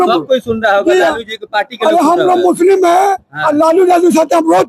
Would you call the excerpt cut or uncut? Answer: uncut